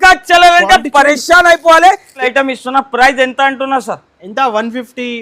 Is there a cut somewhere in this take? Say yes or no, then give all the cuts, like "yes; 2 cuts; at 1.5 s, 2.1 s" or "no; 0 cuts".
yes; 1 cut; at 2.2 s